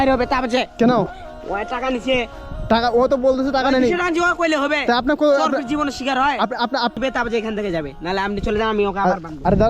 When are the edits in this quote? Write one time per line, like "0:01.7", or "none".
0:06.9

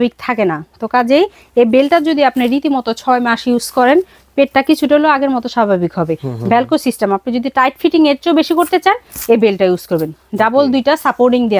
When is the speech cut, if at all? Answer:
none

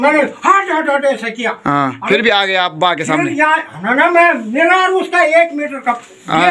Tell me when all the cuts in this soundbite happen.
0:02.0

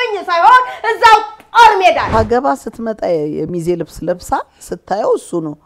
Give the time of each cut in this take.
0:02.0

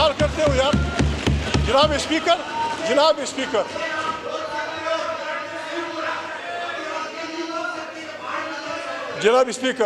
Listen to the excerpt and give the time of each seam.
none

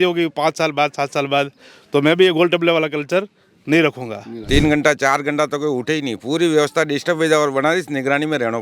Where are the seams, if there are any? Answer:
0:04.5

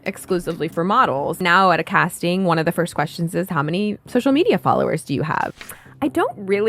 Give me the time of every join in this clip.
0:01.4
0:05.5

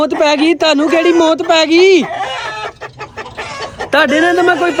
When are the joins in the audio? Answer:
none

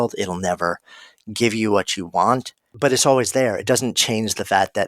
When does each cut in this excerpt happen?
0:02.6

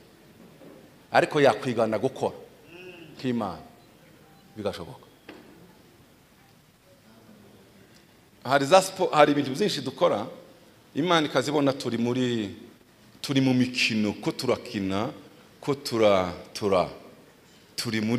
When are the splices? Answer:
0:06.5

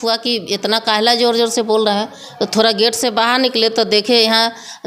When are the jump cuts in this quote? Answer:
none

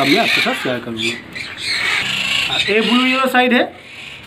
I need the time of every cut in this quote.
none

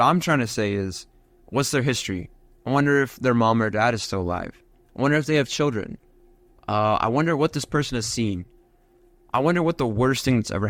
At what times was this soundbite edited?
none

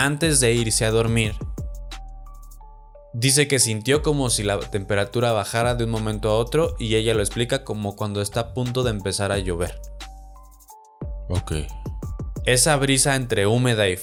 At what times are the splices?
none

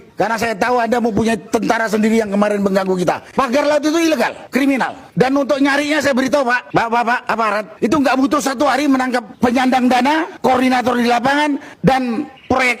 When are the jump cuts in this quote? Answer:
none

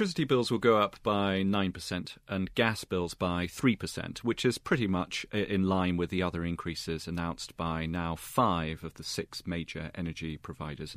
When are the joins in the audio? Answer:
none

